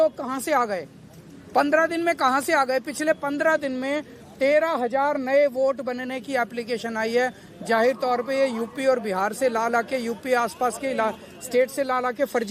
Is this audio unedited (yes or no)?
yes